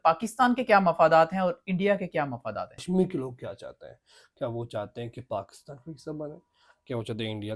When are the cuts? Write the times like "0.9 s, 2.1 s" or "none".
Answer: 2.8 s